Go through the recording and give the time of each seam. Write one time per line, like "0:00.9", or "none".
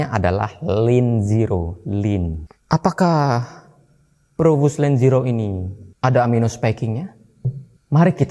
0:02.5